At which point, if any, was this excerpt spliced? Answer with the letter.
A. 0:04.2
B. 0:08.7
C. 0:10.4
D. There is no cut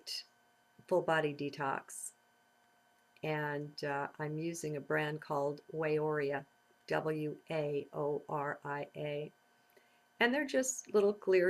A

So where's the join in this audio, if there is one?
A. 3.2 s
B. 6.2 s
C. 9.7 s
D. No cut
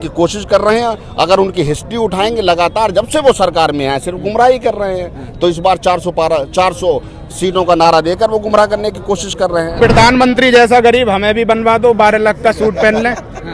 C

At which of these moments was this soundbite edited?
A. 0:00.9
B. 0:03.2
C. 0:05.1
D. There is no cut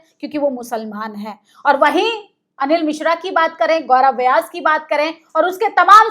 D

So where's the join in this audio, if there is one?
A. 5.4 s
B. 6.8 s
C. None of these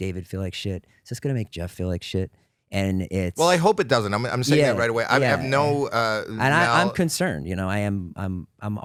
C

